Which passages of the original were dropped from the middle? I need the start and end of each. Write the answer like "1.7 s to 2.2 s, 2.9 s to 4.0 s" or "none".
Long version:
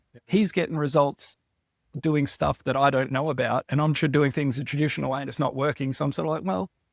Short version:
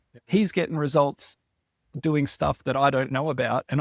none